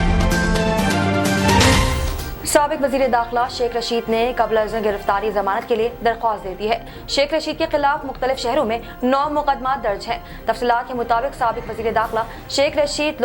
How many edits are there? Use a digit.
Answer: 1